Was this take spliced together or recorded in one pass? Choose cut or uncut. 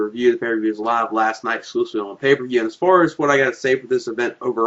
uncut